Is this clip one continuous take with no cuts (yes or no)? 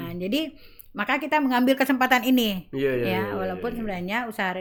yes